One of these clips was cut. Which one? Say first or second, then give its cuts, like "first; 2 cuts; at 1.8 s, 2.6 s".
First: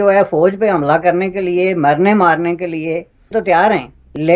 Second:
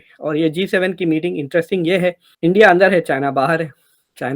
first; 1 cut; at 3.2 s